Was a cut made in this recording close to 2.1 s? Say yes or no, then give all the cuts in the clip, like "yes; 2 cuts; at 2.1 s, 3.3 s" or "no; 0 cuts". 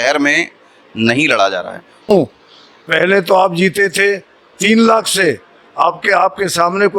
yes; 1 cut; at 2.1 s